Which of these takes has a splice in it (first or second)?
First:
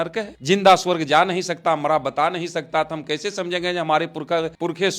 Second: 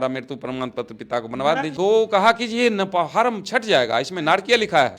second